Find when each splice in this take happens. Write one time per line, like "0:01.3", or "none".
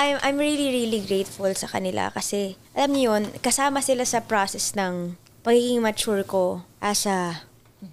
0:02.6
0:05.2
0:06.7